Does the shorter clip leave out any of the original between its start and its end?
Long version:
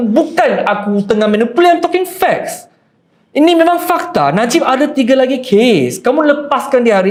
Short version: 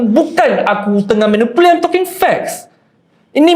no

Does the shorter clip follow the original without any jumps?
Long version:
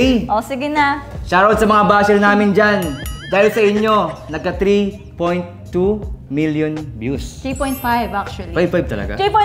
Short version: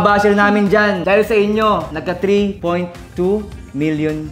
no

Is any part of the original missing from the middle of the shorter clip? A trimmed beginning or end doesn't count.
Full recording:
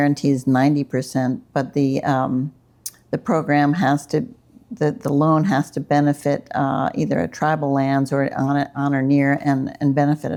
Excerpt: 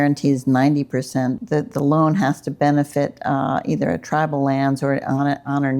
yes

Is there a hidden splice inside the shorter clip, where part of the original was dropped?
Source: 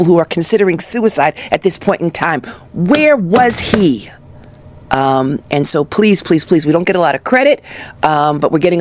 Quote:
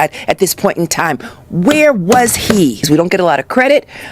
yes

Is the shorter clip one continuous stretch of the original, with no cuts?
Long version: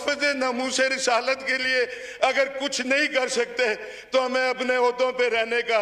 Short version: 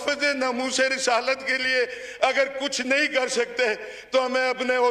yes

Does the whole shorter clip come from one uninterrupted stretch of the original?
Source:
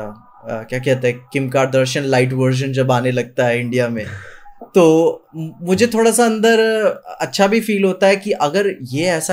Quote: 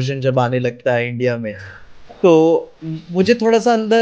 yes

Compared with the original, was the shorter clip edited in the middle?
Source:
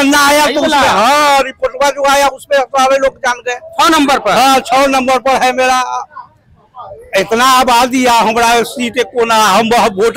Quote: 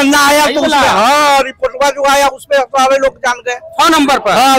no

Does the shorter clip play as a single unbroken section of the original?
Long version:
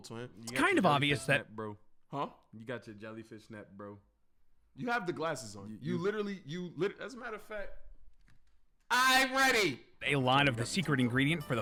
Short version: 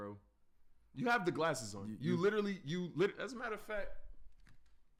yes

